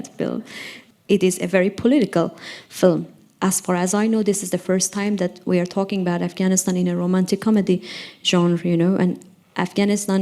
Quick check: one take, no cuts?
no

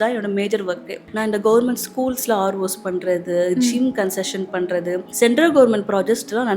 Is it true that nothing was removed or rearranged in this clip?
no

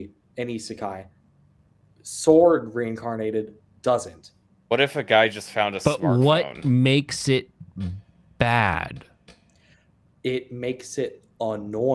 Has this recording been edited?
no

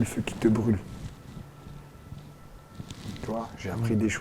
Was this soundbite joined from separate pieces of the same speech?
no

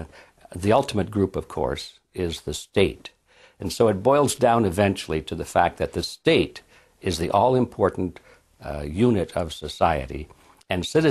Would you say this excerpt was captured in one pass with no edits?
yes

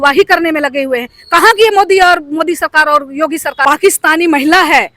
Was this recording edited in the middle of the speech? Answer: yes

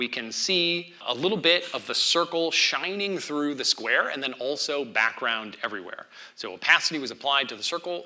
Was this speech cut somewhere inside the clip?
yes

